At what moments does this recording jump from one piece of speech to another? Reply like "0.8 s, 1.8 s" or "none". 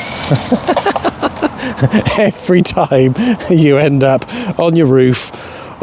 none